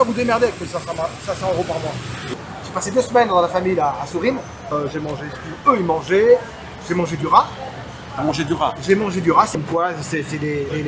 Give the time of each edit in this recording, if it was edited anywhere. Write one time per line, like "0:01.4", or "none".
0:02.4
0:04.7
0:09.5